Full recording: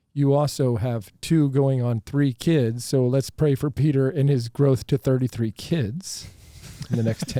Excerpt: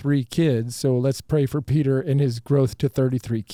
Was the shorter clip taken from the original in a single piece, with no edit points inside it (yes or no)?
yes